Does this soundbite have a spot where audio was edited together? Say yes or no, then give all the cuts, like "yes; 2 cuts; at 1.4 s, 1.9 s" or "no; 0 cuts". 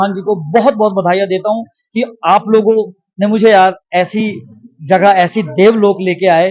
no; 0 cuts